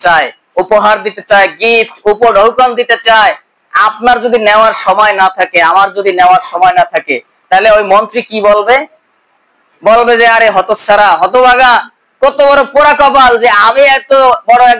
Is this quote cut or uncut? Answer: uncut